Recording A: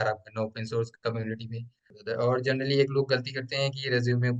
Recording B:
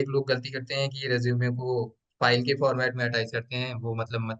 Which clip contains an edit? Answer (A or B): A